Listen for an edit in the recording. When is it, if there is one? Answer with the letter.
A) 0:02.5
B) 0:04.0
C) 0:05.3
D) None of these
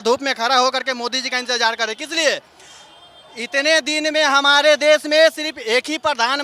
D